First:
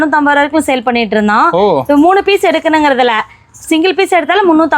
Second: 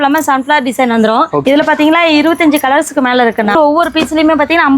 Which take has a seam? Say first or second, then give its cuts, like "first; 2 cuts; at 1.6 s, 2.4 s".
second; 2 cuts; at 1.4 s, 3.5 s